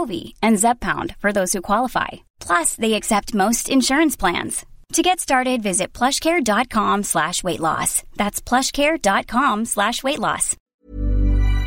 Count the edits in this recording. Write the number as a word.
one